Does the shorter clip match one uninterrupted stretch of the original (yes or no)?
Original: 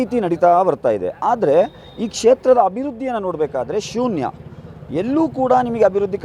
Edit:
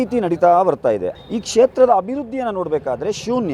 no